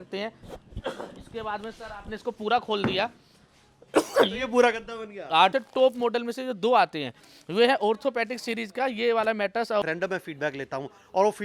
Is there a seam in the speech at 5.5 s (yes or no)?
yes